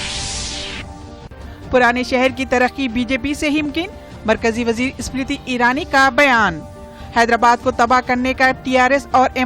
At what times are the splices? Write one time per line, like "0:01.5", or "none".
0:03.7